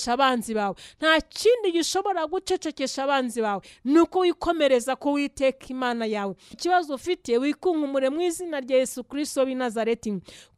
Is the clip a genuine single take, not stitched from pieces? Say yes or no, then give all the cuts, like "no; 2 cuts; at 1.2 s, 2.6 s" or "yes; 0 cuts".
no; 1 cut; at 6.6 s